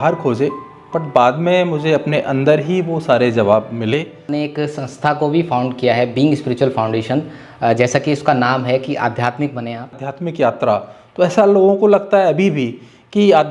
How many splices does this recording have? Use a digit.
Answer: 2